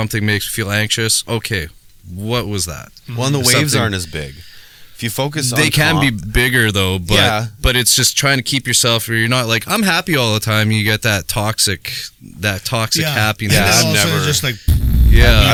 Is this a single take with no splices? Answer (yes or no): yes